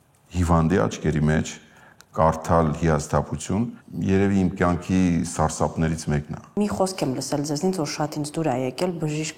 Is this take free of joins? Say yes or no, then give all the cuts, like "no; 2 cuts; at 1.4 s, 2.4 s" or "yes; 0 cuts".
no; 1 cut; at 6.6 s